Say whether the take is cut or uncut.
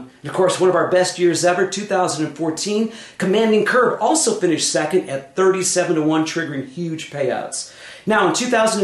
cut